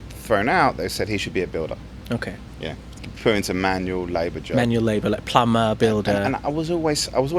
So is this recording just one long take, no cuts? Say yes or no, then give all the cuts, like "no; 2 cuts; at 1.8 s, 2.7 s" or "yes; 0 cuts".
yes; 0 cuts